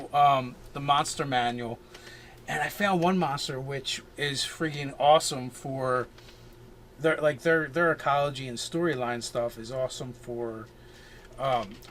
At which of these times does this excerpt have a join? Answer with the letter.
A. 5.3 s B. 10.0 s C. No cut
A